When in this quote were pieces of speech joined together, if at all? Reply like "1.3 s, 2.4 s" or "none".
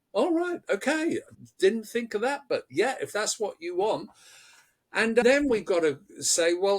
5.2 s

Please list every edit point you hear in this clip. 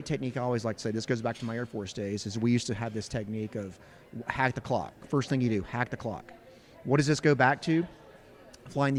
none

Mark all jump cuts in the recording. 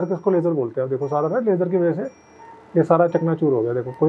none

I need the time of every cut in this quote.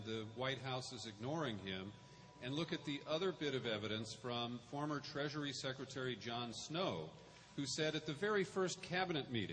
5.9 s

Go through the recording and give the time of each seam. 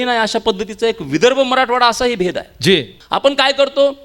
3.0 s

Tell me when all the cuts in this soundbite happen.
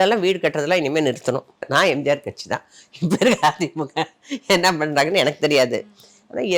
1.6 s

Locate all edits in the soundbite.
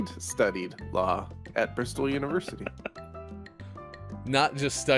3.6 s

